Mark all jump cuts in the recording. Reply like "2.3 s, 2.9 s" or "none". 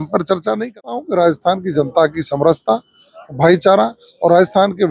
0.9 s